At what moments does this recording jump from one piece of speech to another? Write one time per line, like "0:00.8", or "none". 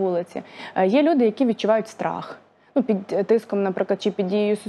none